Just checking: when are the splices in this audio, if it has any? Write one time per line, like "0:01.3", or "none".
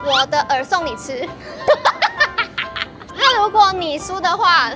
0:02.9